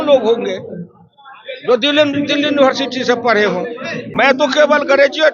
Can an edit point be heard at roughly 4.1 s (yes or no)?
yes